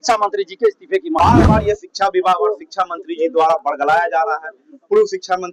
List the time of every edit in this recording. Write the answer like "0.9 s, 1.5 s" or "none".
1.2 s